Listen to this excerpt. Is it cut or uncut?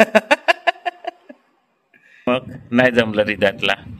cut